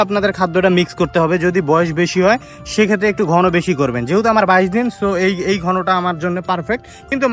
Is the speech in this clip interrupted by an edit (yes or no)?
no